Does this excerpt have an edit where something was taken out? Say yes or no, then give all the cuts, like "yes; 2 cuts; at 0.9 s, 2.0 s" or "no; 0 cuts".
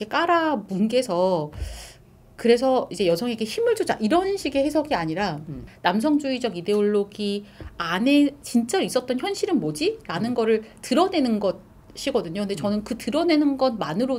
no; 0 cuts